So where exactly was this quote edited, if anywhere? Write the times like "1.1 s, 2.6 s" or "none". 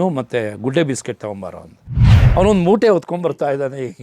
1.9 s